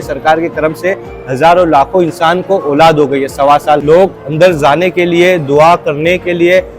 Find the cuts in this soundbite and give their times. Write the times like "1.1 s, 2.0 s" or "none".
3.8 s